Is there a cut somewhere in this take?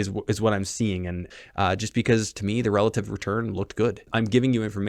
yes; 2 cuts; at 1.2 s, 4.1 s

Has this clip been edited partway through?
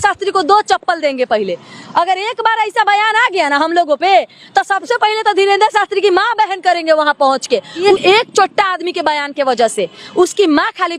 yes; 1 cut; at 7.9 s

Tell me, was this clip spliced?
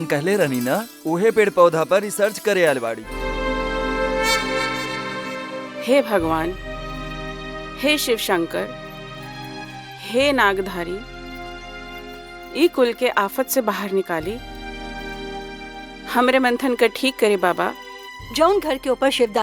yes; 1 cut; at 3.1 s

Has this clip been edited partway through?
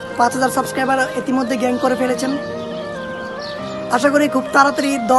no; 0 cuts

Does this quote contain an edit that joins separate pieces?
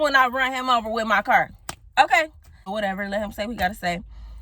yes; 1 cut; at 2.7 s

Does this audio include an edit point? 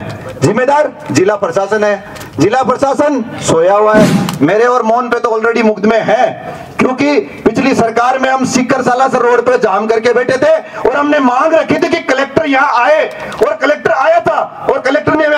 yes; 1 cut; at 4.2 s

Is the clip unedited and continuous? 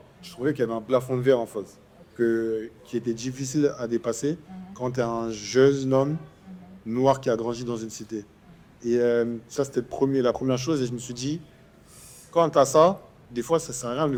yes; 0 cuts

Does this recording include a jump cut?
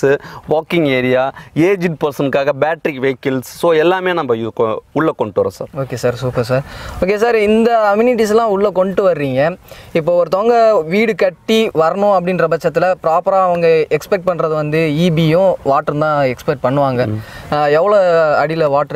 no; 0 cuts

